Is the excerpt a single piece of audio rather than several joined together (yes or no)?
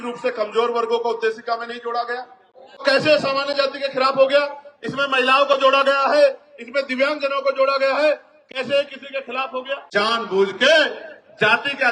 no